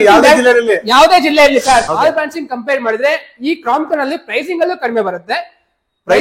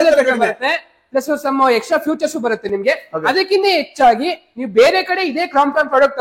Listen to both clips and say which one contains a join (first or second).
first